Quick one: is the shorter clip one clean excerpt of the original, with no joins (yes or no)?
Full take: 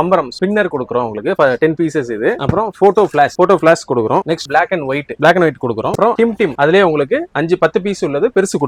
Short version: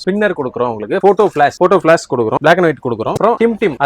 no